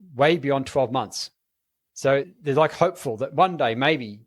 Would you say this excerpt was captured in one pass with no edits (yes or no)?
no